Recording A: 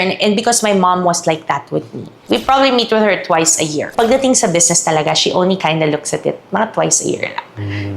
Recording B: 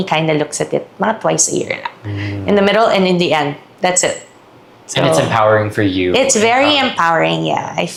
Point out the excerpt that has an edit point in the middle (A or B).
A